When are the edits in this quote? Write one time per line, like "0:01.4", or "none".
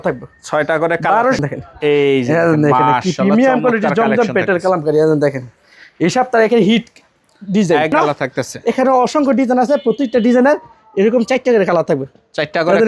0:01.4
0:07.9